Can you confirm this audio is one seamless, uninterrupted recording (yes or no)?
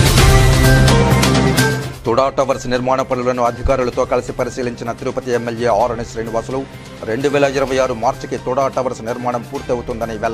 no